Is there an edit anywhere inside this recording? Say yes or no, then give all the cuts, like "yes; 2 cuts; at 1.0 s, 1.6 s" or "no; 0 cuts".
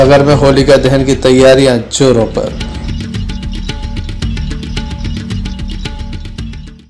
no; 0 cuts